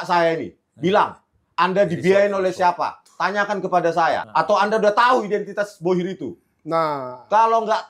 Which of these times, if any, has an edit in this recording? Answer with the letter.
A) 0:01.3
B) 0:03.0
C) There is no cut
C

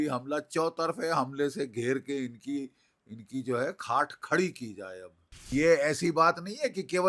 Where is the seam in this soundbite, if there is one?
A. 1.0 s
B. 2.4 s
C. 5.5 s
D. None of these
C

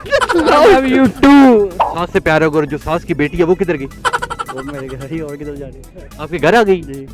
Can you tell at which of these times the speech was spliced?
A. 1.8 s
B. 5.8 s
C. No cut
A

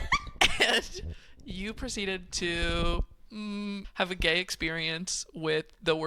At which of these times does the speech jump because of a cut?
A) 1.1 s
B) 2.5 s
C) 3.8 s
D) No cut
C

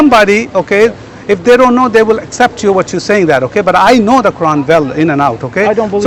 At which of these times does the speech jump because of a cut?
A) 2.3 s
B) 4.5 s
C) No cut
C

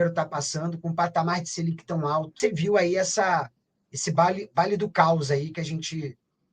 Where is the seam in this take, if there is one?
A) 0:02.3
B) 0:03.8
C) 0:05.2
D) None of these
A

